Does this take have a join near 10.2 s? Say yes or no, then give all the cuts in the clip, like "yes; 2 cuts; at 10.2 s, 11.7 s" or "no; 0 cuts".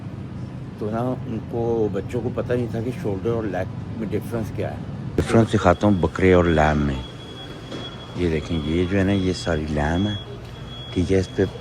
no; 1 cut; at 5.1 s